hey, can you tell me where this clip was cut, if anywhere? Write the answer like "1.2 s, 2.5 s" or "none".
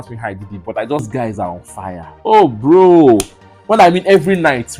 1.1 s